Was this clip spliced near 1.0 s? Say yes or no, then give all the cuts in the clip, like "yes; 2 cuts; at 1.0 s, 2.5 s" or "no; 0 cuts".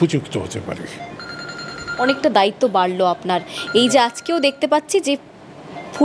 no; 0 cuts